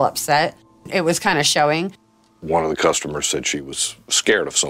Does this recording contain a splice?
yes; 3 cuts; at 0.9 s, 2.0 s, 3.5 s

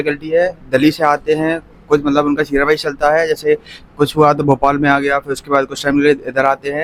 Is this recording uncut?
yes; 0 cuts

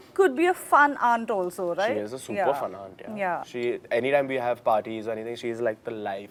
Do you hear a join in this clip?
no; 0 cuts

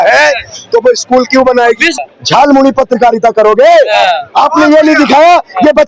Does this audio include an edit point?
yes; 1 cut; at 2.0 s

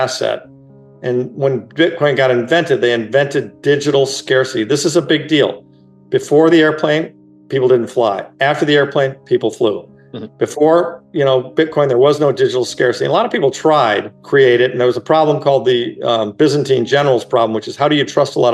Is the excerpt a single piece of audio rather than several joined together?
no; 1 cut; at 14.1 s

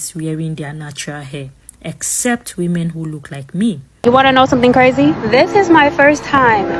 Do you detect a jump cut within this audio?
yes; 1 cut; at 3.9 s

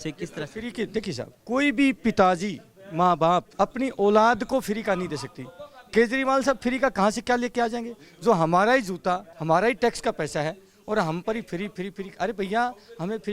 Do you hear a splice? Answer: yes; 3 cuts; at 1.3 s, 3.5 s, 9.3 s

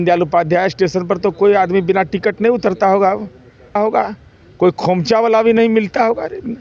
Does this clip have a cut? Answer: yes; 1 cut; at 3.8 s

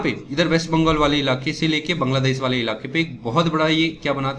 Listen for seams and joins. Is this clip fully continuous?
yes; 0 cuts

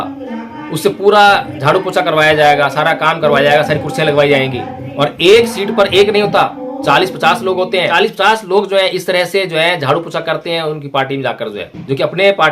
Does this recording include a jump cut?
yes; 1 cut; at 7.9 s

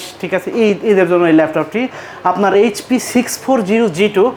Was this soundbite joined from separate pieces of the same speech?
no; 0 cuts

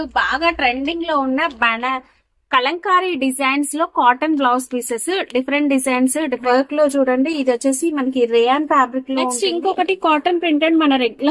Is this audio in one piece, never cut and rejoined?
no; 2 cuts; at 6.4 s, 9.3 s

